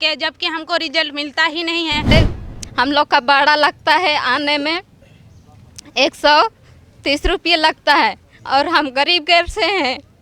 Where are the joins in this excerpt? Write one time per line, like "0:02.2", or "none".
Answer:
0:02.1